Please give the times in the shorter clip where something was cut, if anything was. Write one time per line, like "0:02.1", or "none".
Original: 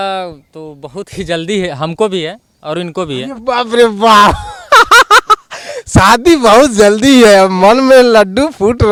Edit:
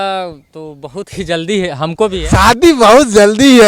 0:02.2